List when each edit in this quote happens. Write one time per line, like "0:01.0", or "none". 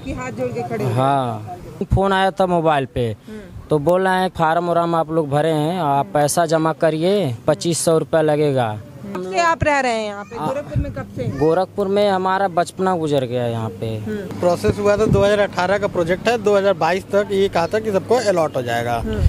0:01.9
0:04.3
0:09.2
0:14.4

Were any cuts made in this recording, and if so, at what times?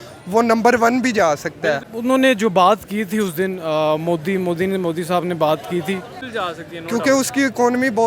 0:01.9
0:06.3

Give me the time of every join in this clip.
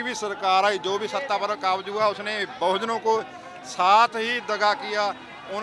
none

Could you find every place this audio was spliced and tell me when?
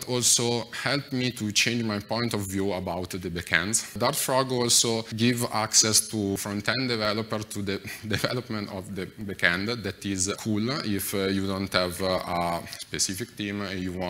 0:04.0
0:05.1
0:06.4
0:10.4

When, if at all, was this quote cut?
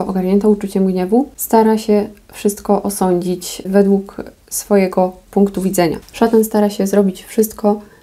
0:01.4
0:03.6
0:06.0

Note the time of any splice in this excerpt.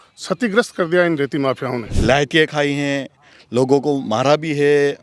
0:01.9

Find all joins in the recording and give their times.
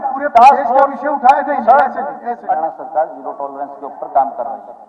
0:02.5

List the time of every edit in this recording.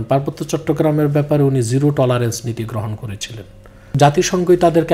0:04.0

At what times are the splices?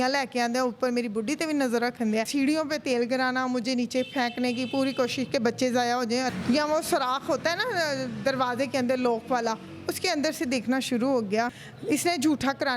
0:02.3
0:06.3
0:11.7

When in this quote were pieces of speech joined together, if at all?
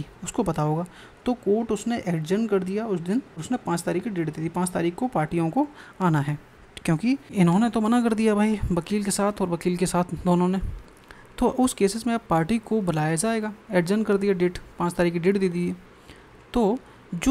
0:03.3
0:07.3

